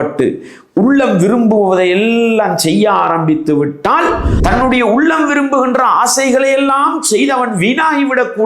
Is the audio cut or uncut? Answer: cut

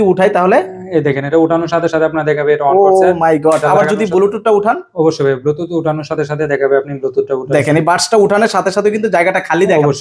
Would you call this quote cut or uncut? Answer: uncut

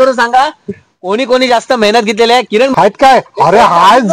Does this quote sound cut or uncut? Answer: cut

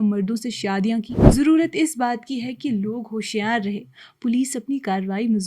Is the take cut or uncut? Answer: cut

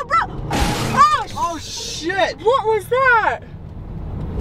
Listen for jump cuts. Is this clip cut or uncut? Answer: uncut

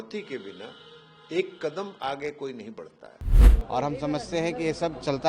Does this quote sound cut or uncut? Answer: cut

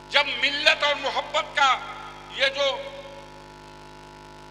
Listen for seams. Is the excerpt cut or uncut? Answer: uncut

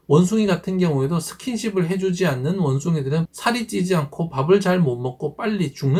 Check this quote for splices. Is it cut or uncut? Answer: uncut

